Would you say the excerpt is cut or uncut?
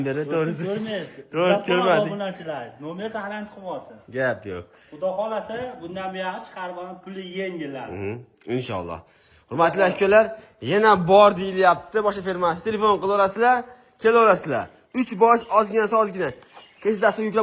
uncut